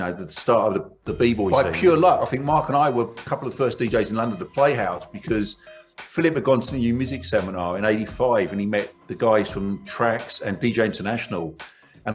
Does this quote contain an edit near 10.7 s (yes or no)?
no